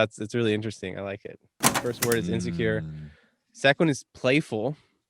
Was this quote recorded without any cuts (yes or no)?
no